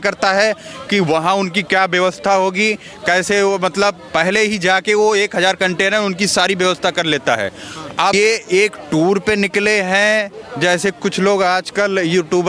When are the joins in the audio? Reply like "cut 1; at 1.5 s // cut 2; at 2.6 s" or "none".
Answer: cut 1; at 8.1 s